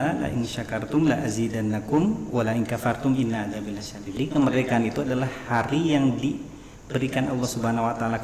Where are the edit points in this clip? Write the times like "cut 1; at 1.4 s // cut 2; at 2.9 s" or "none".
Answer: cut 1; at 4.1 s